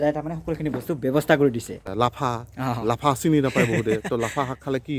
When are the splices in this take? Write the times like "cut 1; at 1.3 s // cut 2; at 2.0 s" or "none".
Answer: cut 1; at 1.8 s

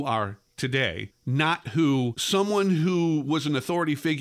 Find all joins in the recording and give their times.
cut 1; at 1.1 s // cut 2; at 2.2 s

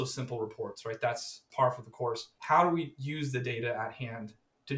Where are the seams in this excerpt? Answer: cut 1; at 1.5 s // cut 2; at 2.3 s

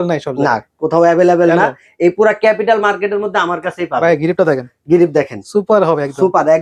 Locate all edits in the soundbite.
none

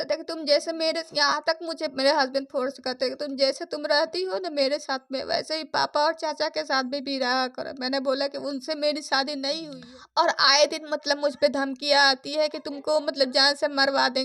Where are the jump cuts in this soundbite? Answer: cut 1; at 9.7 s

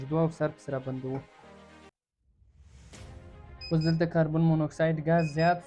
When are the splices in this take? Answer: cut 1; at 1.2 s // cut 2; at 3.7 s

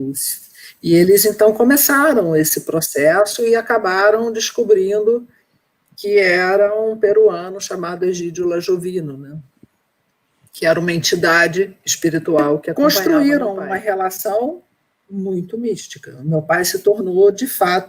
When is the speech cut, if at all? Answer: cut 1; at 12.7 s

